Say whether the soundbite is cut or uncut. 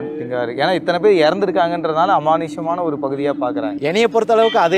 cut